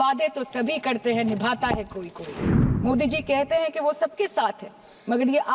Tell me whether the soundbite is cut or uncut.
cut